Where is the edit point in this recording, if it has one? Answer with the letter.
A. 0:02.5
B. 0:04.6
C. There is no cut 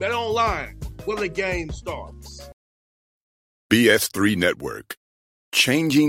A